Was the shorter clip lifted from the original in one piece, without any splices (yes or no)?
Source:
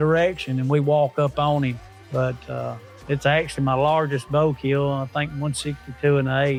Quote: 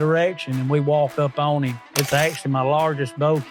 no